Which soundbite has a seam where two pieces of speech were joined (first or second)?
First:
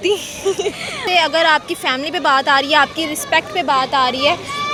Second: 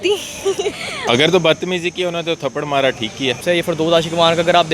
second